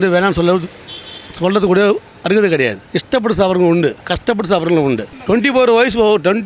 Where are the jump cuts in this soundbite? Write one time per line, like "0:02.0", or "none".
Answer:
0:02.8
0:04.0
0:05.1